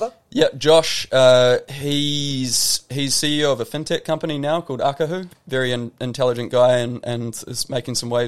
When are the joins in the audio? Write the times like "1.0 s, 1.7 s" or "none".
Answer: 5.3 s